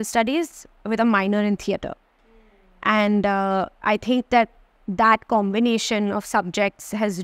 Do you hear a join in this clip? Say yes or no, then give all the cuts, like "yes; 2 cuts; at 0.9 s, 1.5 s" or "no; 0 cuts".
no; 0 cuts